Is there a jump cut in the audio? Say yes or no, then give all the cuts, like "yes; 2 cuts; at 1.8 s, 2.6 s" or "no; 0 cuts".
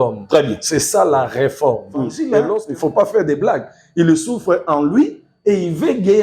yes; 1 cut; at 2.6 s